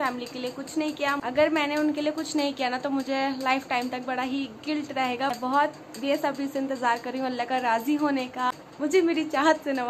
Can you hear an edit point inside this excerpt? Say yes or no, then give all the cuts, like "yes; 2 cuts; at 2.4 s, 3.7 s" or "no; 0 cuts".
yes; 3 cuts; at 1.2 s, 5.4 s, 8.6 s